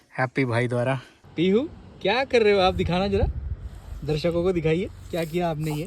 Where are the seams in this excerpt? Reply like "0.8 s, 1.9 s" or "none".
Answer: 1.2 s